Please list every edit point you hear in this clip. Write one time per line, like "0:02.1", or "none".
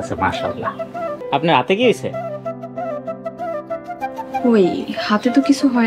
0:01.2